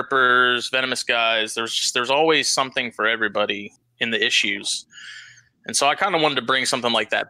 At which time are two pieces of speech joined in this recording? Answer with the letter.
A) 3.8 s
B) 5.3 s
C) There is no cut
A